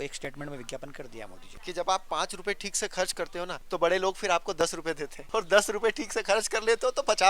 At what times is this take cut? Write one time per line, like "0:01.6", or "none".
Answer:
0:01.5
0:03.6
0:05.1